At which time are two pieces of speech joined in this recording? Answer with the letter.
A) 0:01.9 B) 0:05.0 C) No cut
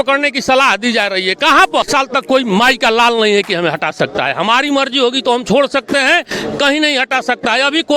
A